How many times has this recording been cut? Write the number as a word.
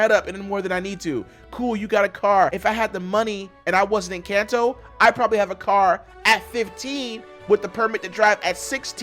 one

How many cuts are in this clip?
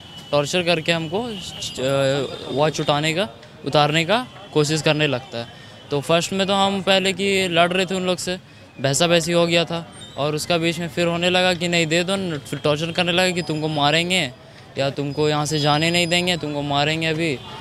zero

